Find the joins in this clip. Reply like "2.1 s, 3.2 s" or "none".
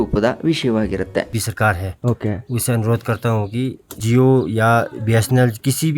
1.3 s, 4.0 s